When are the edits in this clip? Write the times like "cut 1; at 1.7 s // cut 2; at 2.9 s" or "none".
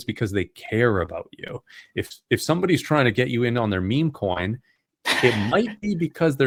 none